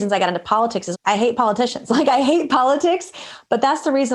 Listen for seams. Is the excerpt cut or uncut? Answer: cut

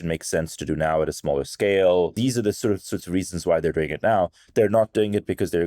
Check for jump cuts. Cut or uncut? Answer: cut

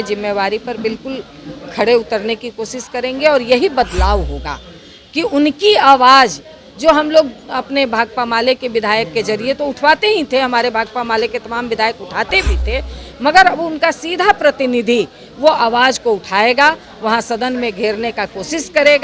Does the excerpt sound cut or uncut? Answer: uncut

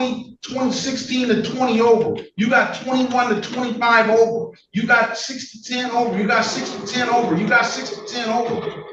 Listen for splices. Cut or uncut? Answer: uncut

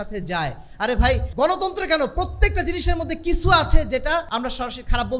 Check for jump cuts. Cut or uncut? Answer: cut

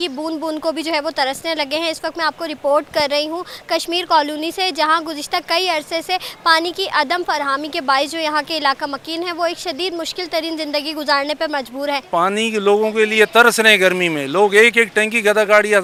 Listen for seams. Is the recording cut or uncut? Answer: uncut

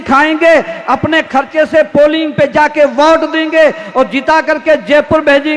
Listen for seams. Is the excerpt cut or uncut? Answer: uncut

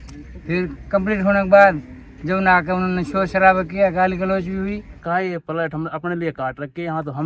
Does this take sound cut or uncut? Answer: cut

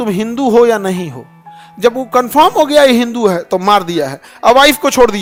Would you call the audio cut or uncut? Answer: uncut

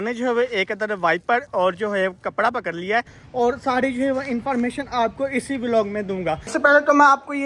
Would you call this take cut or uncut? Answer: cut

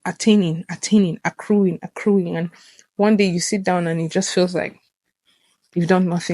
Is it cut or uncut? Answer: uncut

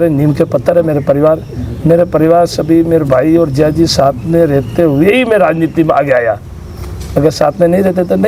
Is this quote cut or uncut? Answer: uncut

